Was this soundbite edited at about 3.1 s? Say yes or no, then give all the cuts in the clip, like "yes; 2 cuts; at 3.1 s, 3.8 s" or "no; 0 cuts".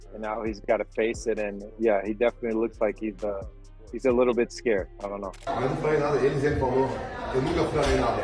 no; 1 cut; at 5.4 s